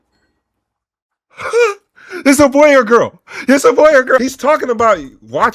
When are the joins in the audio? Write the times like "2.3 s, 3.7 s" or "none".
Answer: 4.2 s